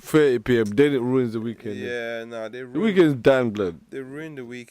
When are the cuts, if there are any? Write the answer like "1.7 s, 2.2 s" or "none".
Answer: none